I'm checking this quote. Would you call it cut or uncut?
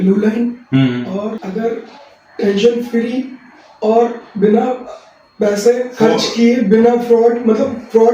cut